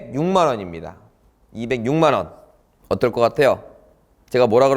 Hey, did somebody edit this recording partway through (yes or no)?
no